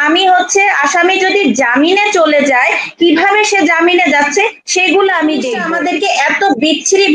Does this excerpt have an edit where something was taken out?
yes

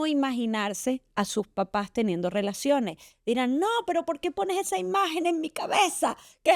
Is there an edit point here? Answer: no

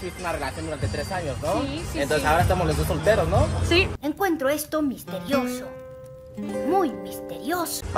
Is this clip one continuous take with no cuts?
yes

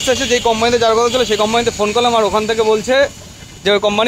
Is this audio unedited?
yes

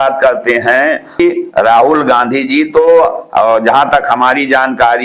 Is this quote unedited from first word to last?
no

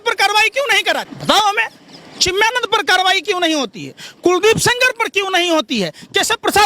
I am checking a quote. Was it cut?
yes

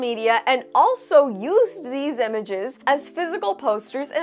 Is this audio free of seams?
no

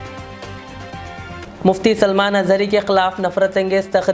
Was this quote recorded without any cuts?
no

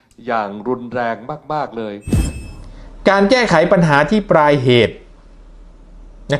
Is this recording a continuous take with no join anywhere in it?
no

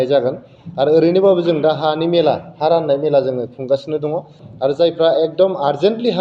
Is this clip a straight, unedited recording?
no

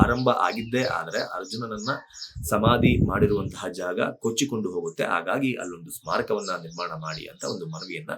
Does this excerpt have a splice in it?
no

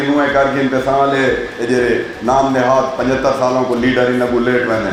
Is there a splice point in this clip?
no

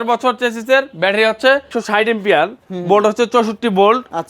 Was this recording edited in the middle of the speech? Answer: yes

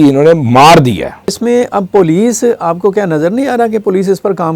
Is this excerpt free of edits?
no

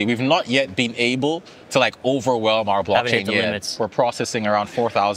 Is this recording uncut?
no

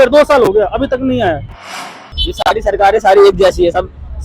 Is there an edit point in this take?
yes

